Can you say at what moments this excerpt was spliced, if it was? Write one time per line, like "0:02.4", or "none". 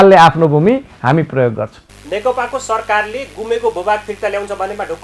none

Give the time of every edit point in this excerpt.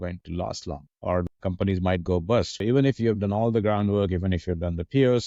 0:01.1
0:02.6

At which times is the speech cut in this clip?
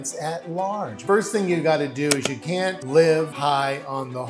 0:00.9
0:02.6
0:03.3

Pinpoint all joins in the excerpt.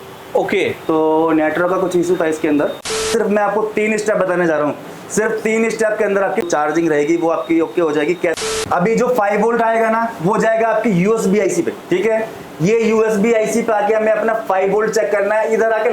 0:03.1
0:06.5
0:08.4
0:11.8

